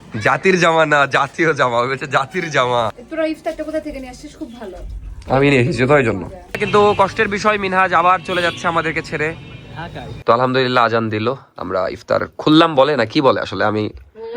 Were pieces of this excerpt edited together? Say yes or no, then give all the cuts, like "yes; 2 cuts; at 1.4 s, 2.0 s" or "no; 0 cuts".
yes; 3 cuts; at 3.0 s, 6.6 s, 10.2 s